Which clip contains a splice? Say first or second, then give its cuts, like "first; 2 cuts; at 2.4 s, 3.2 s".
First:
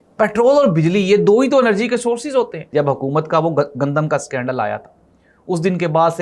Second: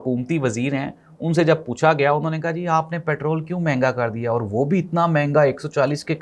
first; 1 cut; at 2.6 s